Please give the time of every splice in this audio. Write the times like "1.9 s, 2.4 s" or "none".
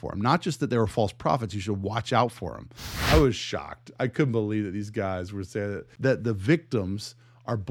3.0 s, 5.9 s